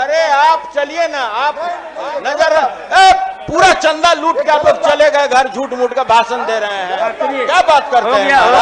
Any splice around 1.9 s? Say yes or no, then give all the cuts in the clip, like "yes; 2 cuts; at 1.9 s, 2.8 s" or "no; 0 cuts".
yes; 1 cut; at 1.9 s